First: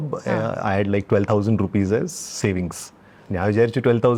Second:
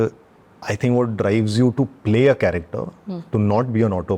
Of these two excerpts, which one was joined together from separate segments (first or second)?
first